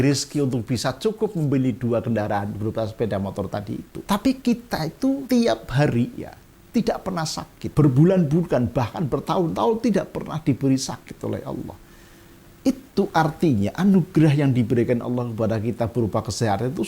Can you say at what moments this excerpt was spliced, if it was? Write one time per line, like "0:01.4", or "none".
0:03.9
0:05.2
0:07.6